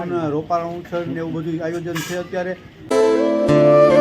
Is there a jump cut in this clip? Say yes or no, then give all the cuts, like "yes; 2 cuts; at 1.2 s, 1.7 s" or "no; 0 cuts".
yes; 1 cut; at 2.7 s